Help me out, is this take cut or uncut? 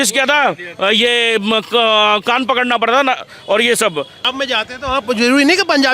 cut